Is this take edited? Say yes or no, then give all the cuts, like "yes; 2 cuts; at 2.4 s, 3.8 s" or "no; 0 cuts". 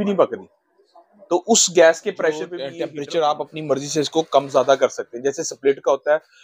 yes; 1 cut; at 2.6 s